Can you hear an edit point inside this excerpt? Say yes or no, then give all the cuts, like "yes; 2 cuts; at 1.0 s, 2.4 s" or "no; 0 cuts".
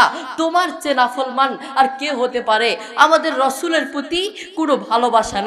no; 0 cuts